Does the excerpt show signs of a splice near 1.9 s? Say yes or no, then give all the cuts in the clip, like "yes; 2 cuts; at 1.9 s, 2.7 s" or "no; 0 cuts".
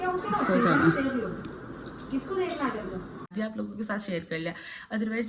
no; 1 cut; at 3.3 s